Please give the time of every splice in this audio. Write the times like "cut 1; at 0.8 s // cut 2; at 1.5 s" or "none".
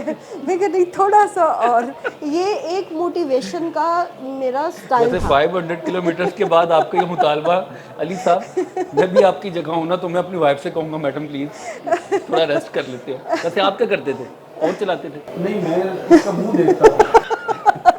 none